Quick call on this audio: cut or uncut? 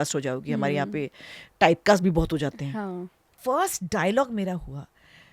cut